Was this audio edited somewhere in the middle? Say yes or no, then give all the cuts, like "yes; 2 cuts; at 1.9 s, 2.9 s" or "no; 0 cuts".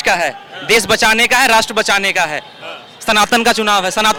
no; 0 cuts